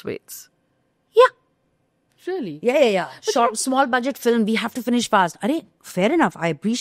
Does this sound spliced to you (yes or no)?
no